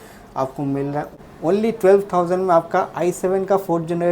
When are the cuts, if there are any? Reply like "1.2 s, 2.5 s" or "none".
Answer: 1.1 s